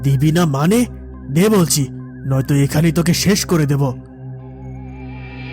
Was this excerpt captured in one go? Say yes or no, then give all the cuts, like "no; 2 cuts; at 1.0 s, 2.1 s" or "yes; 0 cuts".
no; 1 cut; at 3.9 s